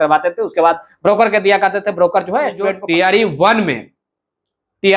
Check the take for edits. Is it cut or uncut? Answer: cut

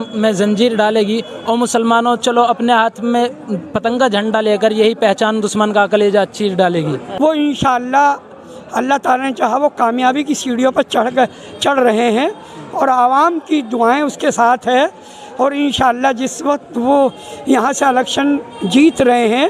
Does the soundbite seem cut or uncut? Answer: cut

